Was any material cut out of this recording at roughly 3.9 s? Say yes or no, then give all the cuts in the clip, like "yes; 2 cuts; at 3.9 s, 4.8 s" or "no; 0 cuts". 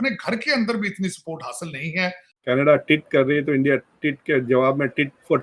no; 1 cut; at 2.3 s